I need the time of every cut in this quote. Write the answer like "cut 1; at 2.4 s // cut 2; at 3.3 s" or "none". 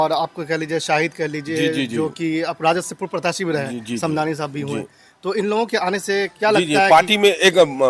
none